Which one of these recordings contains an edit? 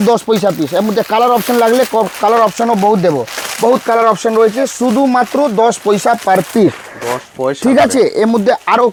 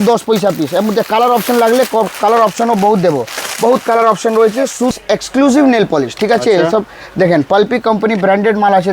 second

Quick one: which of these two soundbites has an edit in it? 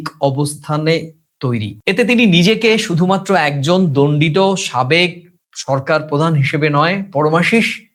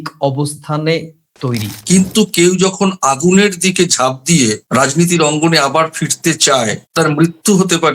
second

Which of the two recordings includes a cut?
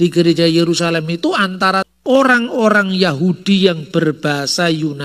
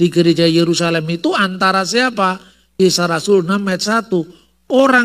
first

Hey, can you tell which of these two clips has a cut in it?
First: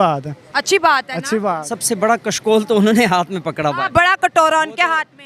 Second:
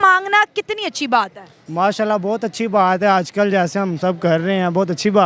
first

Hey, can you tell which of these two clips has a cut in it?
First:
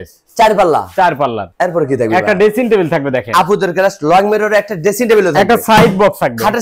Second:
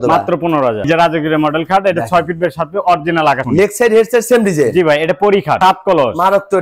second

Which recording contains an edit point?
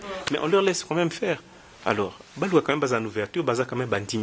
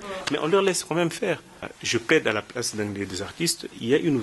second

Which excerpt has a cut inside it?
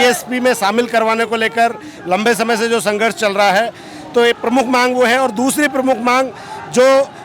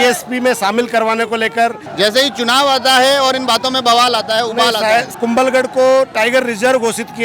second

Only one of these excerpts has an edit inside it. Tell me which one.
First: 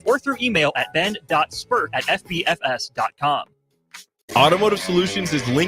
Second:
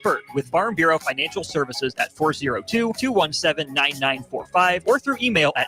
first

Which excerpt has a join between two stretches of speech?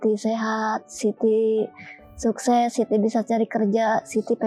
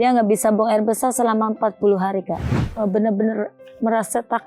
second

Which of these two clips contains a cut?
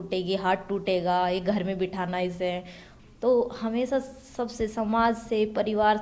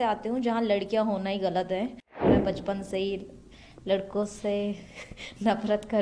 second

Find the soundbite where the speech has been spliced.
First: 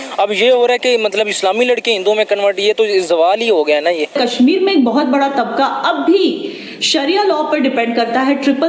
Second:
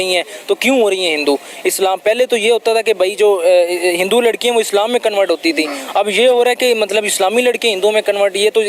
first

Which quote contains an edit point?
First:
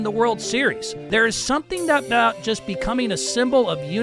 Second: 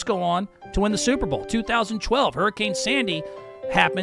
first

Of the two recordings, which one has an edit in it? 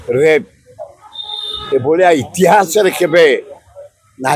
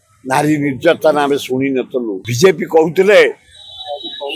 second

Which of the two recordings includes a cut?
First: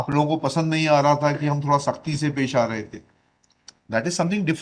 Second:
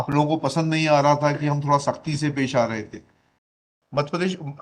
second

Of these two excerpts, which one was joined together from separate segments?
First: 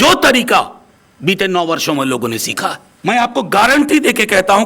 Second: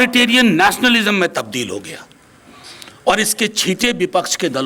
first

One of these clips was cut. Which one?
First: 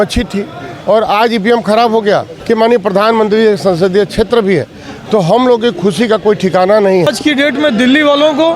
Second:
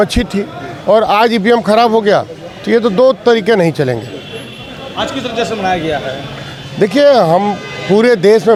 first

